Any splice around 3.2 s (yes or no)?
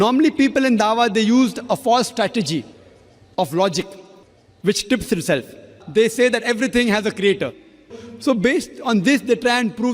no